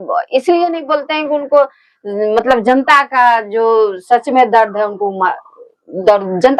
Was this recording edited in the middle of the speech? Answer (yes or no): no